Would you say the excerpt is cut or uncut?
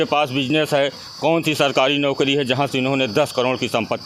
uncut